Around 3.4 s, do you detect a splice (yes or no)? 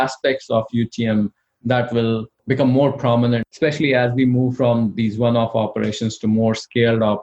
yes